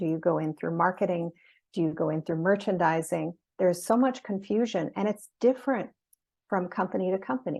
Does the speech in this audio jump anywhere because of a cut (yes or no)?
no